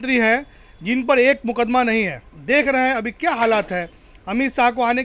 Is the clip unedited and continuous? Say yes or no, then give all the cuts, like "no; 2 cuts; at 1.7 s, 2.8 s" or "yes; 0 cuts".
no; 1 cut; at 2.3 s